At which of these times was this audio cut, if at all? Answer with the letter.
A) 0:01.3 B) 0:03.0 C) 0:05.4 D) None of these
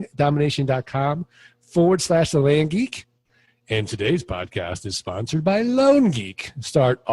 B